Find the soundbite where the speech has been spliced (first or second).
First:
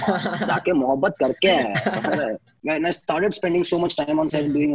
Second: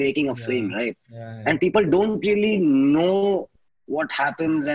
first